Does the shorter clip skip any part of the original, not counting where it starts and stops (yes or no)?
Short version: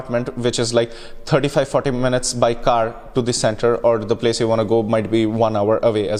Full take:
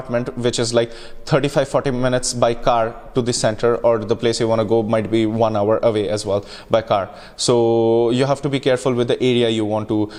no